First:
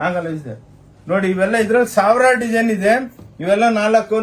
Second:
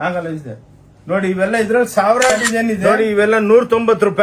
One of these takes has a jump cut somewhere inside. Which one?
second; 1 cut; at 2.8 s

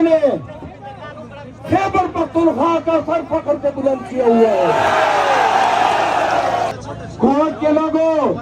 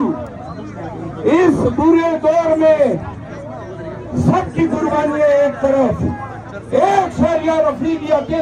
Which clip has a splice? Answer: first; 1 cut; at 6.7 s

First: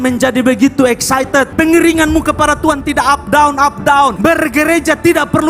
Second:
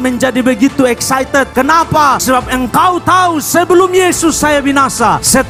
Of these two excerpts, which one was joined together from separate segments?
first; 2 cuts; at 1.5 s, 4.2 s

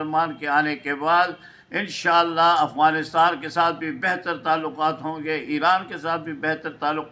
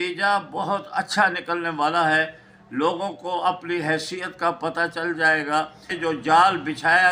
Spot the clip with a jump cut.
second; 1 cut; at 5.8 s

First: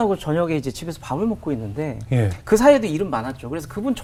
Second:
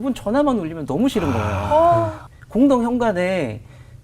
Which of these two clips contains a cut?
second; 1 cut; at 2.2 s

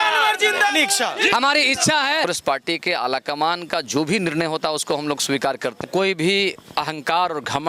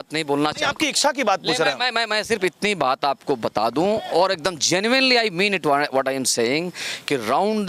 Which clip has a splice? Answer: first; 3 cuts; at 1.3 s, 2.2 s, 5.8 s

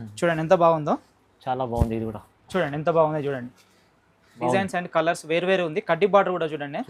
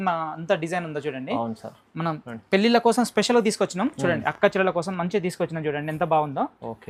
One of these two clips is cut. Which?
first; 1 cut; at 4.3 s

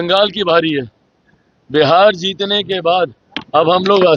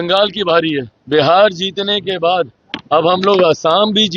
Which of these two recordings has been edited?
second; 1 cut; at 0.9 s

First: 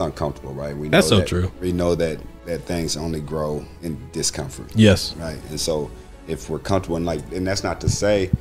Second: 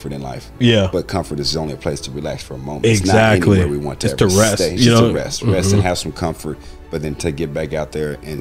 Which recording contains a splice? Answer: first; 2 cuts; at 2.3 s, 3.7 s

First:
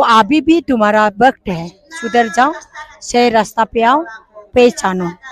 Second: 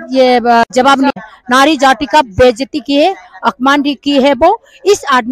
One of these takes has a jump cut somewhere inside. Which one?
second; 1 cut; at 1.1 s

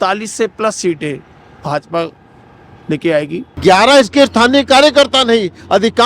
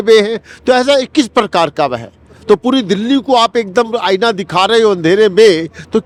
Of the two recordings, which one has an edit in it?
first; 1 cut; at 3.4 s

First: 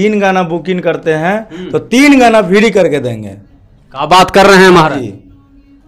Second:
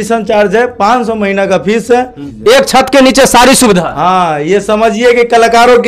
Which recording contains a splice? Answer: second; 1 cut; at 2.2 s

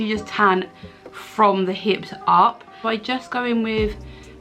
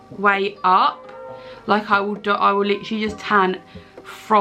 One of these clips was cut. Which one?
first; 1 cut; at 2.8 s

